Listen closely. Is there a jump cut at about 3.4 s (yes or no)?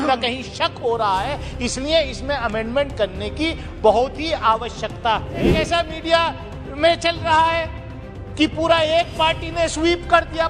no